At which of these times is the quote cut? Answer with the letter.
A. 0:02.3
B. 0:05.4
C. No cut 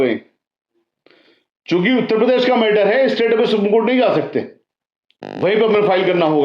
B